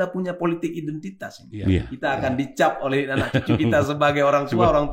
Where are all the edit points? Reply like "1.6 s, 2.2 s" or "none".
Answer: 1.9 s

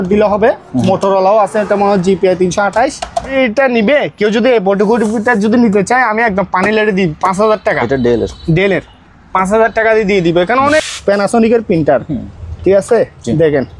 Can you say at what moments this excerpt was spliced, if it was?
3.3 s, 10.9 s

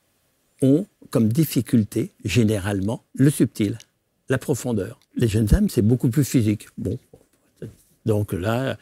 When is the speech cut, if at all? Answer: 3.0 s, 5.0 s

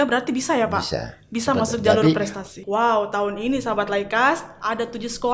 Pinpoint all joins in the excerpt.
2.5 s

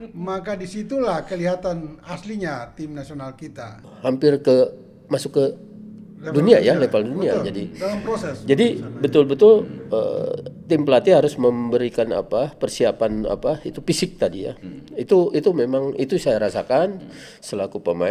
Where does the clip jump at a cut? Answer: 3.8 s

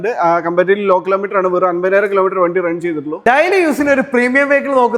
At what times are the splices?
3.1 s

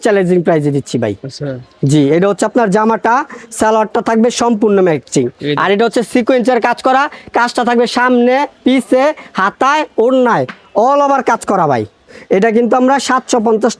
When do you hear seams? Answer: none

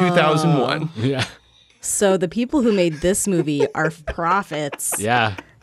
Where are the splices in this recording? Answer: 4.0 s

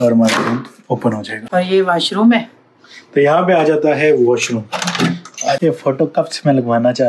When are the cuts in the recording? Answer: 1.3 s, 5.6 s

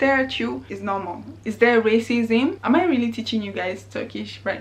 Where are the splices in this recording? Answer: 1.4 s, 2.6 s

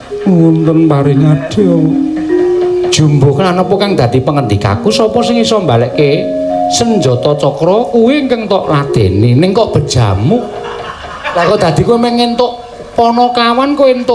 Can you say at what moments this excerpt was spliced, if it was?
none

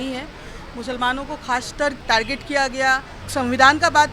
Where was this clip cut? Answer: 2.0 s, 3.1 s

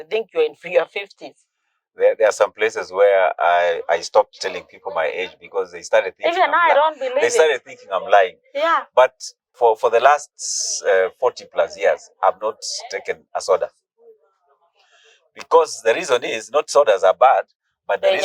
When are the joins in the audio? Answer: 9.5 s

